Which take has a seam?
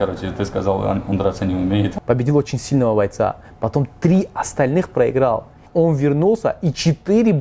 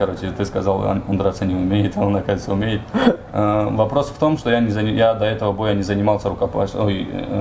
first; 2 cuts; at 1.9 s, 5.6 s

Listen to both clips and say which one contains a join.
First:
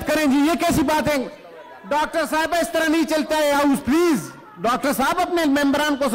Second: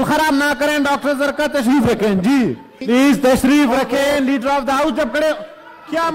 second; 1 cut; at 2.8 s

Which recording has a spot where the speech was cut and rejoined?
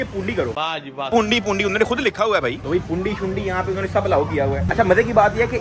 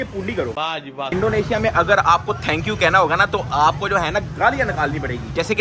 second; 1 cut; at 1.1 s

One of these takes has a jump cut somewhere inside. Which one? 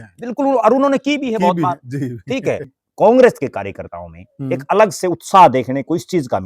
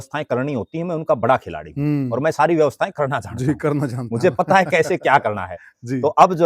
first; 1 cut; at 2.8 s

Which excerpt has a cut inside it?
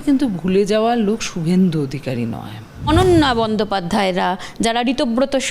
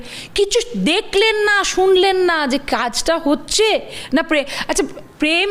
first; 1 cut; at 2.9 s

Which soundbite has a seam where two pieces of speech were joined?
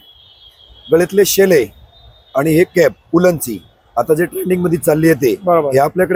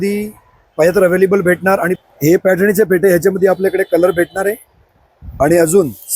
second; 1 cut; at 1.9 s

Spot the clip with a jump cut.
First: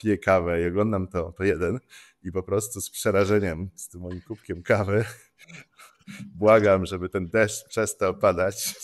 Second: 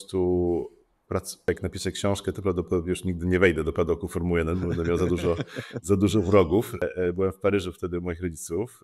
second; 2 cuts; at 1.5 s, 6.8 s

